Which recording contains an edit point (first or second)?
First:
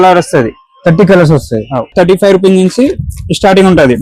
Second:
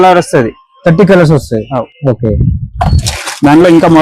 first